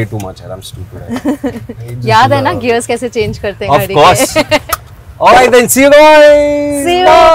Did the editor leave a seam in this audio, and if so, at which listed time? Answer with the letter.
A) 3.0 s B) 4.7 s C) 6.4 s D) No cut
B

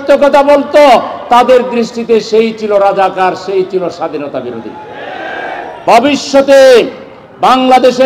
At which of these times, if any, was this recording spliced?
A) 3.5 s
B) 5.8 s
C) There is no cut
B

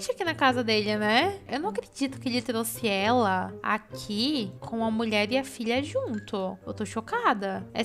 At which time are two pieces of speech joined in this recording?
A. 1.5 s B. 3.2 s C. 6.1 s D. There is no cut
A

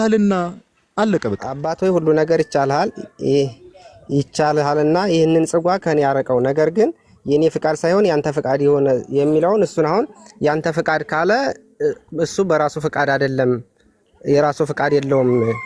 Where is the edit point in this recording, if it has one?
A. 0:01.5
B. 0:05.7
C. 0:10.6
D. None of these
A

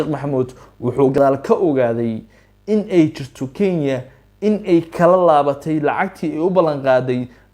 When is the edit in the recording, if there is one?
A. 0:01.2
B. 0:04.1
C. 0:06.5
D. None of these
A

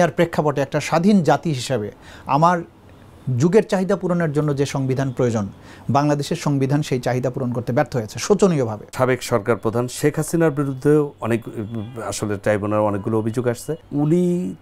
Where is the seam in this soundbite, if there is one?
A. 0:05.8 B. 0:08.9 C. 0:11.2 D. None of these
B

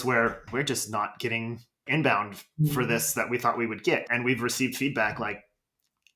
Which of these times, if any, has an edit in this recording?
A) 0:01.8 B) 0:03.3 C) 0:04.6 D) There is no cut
A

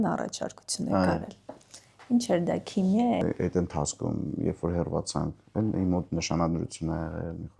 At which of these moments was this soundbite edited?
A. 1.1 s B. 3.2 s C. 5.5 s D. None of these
B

